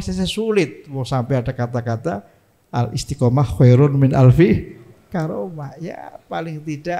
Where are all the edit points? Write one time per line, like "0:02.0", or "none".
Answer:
none